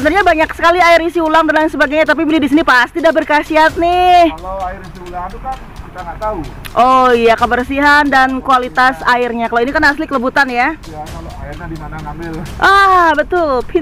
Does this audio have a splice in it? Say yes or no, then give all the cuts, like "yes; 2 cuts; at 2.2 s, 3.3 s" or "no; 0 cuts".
no; 0 cuts